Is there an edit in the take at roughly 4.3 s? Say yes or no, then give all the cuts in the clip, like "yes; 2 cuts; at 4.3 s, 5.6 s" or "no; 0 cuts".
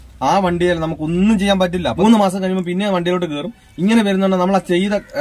no; 1 cut; at 1.9 s